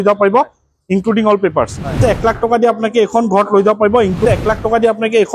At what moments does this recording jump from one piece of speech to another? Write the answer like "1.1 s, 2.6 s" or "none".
2.0 s, 4.2 s